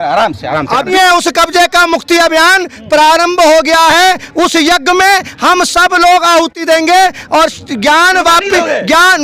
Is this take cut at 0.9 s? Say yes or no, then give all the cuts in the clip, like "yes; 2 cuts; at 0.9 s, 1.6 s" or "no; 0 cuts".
yes; 1 cut; at 0.9 s